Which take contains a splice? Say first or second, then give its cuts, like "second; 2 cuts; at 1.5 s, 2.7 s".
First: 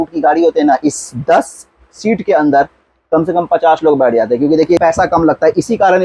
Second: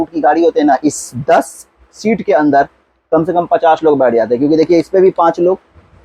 first; 1 cut; at 4.8 s